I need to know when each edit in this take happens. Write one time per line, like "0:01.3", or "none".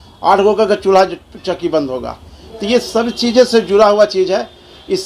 none